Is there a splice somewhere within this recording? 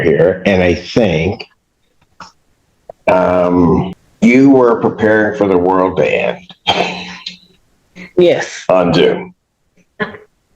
yes; 1 cut; at 4.0 s

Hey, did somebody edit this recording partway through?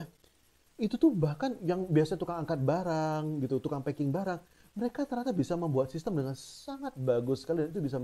no; 0 cuts

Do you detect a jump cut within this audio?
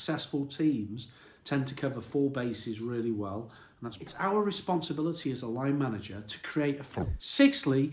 yes; 2 cuts; at 4.0 s, 6.8 s

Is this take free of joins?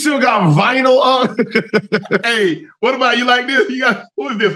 yes; 0 cuts

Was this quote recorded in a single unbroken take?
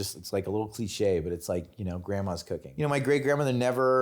no; 1 cut; at 2.7 s

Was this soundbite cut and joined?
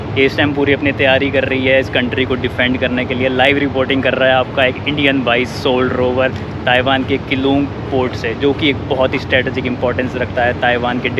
no; 0 cuts

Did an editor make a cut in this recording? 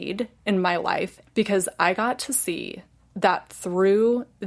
yes; 1 cut; at 1.2 s

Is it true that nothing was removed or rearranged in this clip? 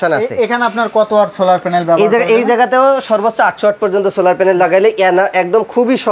yes; 0 cuts

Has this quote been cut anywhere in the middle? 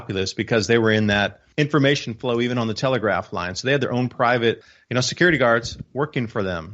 no; 0 cuts

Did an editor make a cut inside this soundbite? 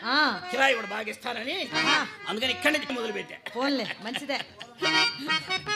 yes; 1 cut; at 2.9 s

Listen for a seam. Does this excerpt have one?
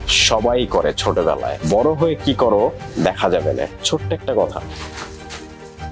no; 0 cuts

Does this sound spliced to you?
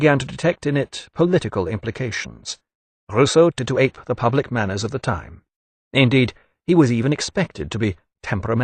no; 0 cuts

